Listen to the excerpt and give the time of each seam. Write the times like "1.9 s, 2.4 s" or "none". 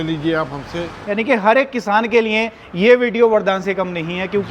0.9 s